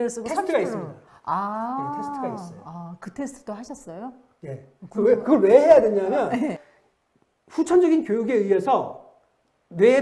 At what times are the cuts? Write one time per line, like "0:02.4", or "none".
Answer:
0:06.6

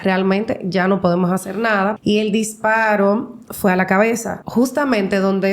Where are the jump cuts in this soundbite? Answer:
0:02.0
0:04.3

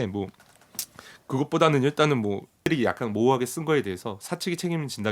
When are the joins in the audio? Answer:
0:02.7

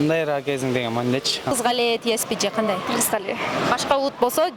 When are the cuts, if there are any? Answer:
0:01.5

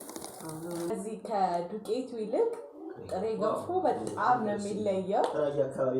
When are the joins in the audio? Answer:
0:00.9

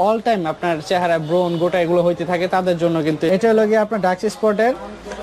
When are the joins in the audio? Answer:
0:03.3

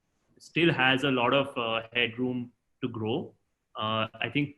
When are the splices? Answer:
none

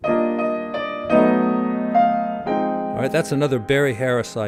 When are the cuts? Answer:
none

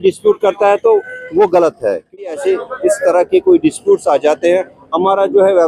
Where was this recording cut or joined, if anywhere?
0:02.2

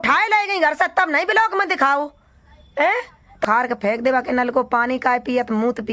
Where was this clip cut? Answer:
0:03.4

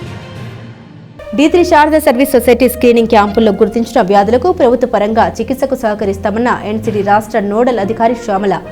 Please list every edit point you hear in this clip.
0:01.1

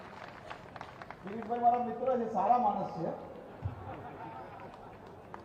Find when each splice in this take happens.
none

